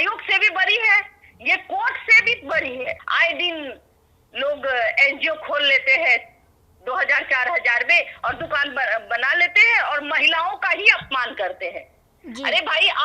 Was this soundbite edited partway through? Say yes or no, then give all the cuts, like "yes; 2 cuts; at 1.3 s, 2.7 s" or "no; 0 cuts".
no; 0 cuts